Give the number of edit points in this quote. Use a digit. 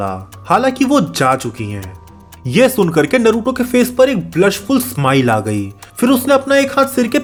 0